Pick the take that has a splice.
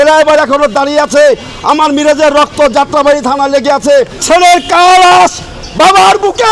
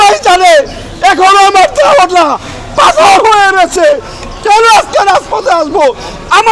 first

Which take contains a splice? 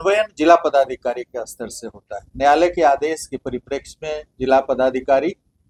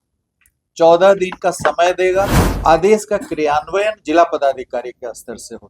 second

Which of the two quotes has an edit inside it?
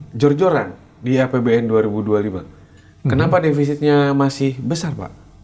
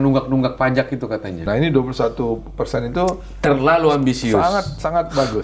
second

